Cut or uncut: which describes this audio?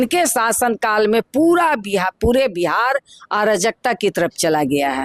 uncut